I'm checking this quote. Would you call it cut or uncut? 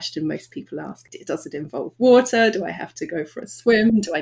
cut